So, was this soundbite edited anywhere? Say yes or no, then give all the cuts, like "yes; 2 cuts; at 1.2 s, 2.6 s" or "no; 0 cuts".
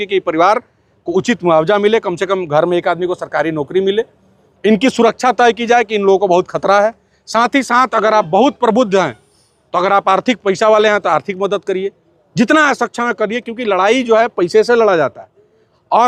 no; 0 cuts